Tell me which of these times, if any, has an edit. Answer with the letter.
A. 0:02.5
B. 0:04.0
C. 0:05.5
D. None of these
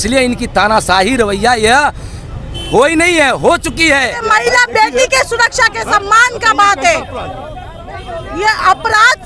B